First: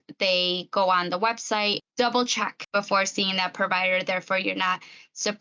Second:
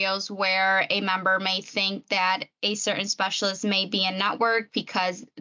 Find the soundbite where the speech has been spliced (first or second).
first